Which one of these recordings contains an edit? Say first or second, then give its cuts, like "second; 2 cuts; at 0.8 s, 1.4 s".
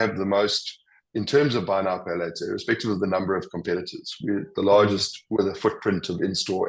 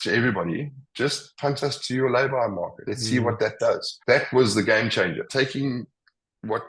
second; 3 cuts; at 2.9 s, 3.9 s, 5.3 s